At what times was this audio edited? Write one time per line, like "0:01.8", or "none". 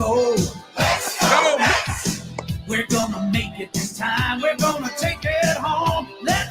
0:04.1